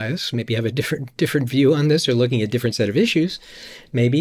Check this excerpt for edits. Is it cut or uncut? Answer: uncut